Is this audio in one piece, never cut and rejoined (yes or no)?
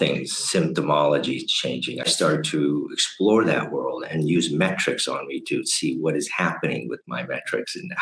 no